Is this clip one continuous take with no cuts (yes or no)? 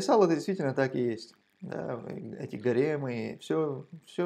yes